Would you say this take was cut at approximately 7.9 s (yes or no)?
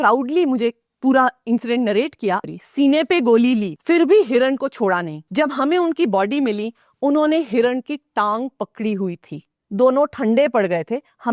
no